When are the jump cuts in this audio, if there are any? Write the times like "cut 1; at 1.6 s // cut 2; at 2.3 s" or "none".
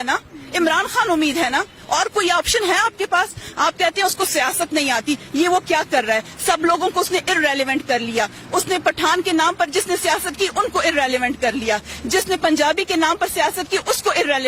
none

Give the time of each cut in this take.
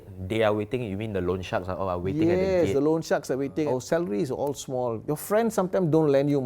cut 1; at 3.7 s // cut 2; at 5.0 s

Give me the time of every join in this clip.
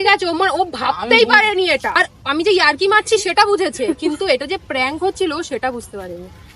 cut 1; at 1.9 s

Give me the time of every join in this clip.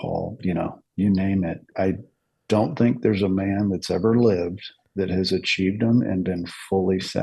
cut 1; at 1.7 s

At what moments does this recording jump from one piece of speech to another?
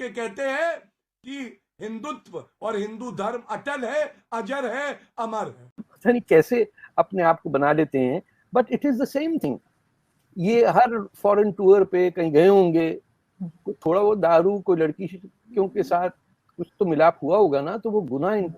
cut 1; at 5.8 s

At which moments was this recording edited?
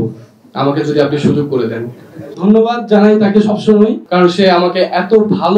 cut 1; at 2.3 s // cut 2; at 4.0 s

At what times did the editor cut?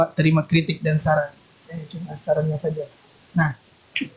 none

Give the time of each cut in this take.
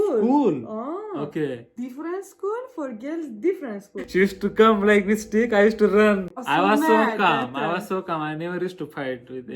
cut 1; at 4.0 s // cut 2; at 6.4 s

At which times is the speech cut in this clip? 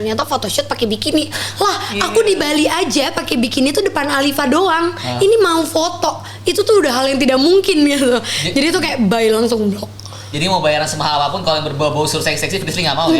none

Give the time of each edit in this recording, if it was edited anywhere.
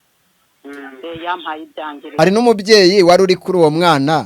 cut 1; at 2.0 s

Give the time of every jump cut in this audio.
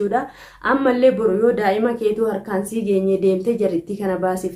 none

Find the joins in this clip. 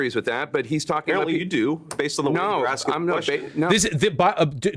none

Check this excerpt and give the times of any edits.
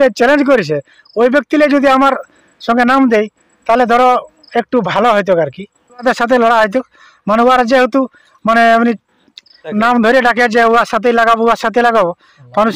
cut 1; at 6.0 s // cut 2; at 9.7 s

